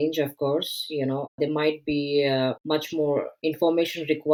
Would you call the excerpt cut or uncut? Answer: uncut